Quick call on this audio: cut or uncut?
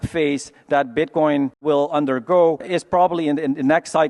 uncut